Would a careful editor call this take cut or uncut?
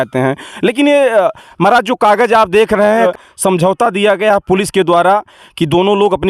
cut